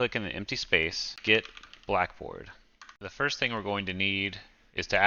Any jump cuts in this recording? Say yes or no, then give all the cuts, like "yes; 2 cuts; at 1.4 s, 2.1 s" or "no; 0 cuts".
yes; 2 cuts; at 1.1 s, 3.0 s